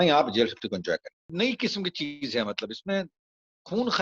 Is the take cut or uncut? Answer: cut